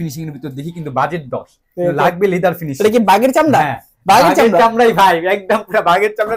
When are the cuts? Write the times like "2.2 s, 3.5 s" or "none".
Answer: none